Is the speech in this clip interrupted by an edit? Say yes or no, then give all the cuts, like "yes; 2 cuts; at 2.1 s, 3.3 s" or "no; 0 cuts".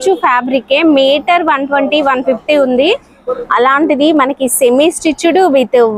no; 0 cuts